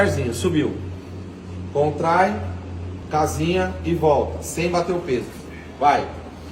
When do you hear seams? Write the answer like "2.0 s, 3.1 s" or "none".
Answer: none